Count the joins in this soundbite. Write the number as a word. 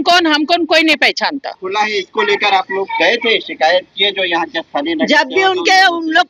one